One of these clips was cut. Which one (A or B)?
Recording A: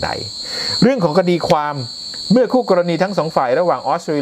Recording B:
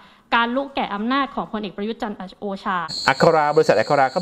B